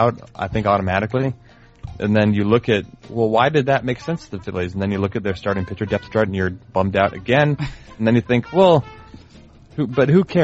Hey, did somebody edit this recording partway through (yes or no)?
no